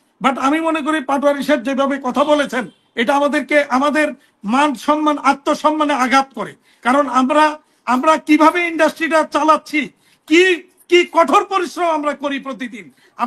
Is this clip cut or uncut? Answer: uncut